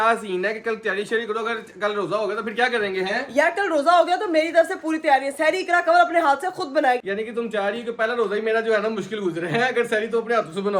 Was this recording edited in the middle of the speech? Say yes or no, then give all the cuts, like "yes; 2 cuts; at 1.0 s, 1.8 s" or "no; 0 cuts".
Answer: yes; 1 cut; at 7.0 s